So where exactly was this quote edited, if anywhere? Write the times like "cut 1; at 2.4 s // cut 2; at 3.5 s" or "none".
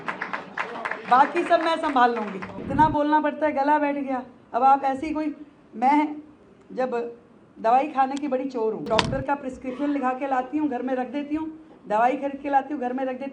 cut 1; at 2.6 s // cut 2; at 8.9 s